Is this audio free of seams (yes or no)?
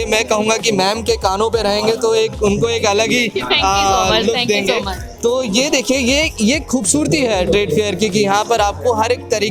yes